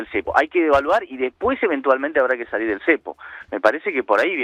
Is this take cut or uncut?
uncut